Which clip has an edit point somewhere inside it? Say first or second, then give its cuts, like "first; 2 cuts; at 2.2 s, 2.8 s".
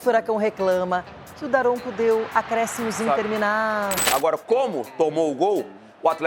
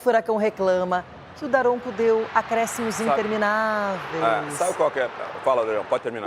first; 1 cut; at 4.0 s